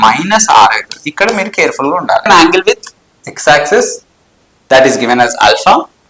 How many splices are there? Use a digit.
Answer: 1